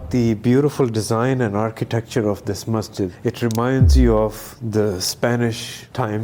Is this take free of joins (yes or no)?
yes